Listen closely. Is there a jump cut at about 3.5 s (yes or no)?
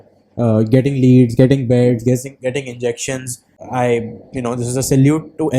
yes